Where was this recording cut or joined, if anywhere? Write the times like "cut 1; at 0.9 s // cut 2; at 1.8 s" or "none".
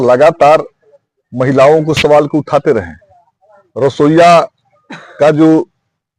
none